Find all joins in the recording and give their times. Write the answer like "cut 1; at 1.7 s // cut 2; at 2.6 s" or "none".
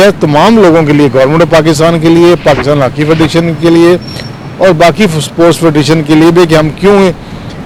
none

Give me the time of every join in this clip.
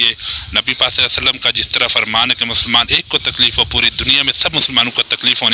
none

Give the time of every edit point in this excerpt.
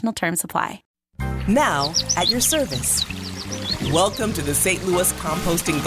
cut 1; at 0.9 s

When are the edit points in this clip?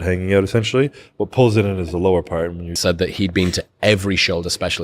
cut 1; at 2.7 s

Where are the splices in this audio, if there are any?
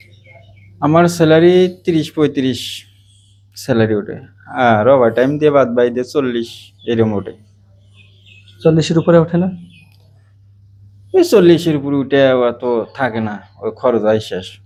none

